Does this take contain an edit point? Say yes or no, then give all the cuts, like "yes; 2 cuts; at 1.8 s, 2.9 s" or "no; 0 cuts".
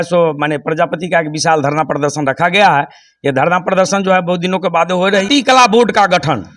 yes; 1 cut; at 5.2 s